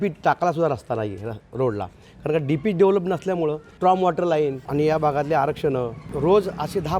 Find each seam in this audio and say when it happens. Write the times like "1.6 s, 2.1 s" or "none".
3.7 s, 4.6 s, 6.0 s